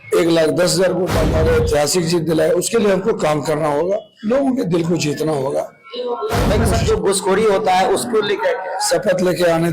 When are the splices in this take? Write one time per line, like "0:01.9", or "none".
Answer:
0:01.2
0:06.7